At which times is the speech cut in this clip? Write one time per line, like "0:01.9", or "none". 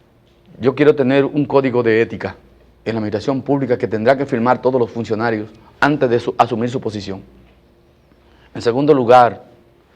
0:02.1